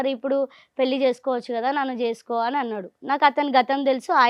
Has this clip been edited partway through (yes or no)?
no